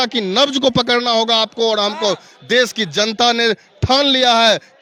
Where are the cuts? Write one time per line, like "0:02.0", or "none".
none

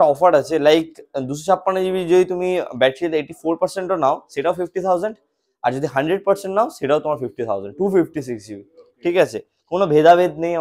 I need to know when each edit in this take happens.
none

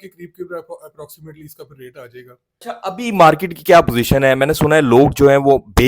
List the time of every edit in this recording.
0:02.4

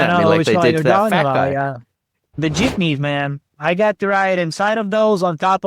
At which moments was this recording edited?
0:02.4
0:03.5

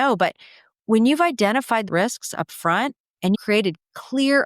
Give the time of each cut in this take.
0:01.8
0:03.4

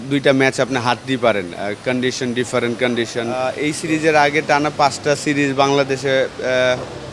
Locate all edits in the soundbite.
0:03.4

